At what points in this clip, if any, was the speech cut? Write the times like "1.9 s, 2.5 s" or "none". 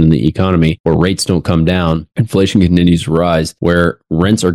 0.8 s, 2.1 s, 3.5 s